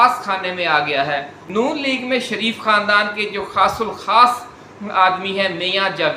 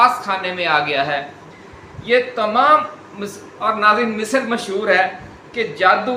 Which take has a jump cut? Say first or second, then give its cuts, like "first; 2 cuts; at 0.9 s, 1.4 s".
first; 1 cut; at 1.4 s